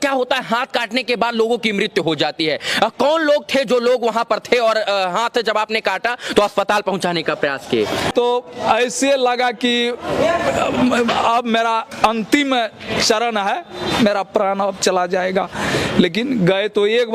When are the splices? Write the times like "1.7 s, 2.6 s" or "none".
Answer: 8.1 s